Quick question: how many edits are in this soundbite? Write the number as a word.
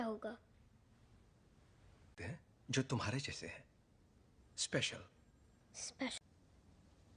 zero